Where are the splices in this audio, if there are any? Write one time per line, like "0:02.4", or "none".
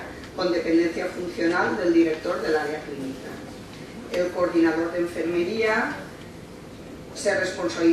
none

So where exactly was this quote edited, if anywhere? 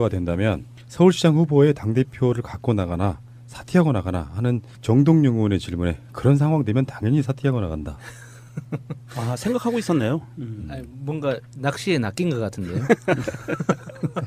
0:06.7

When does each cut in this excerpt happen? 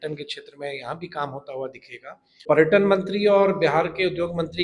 0:02.5

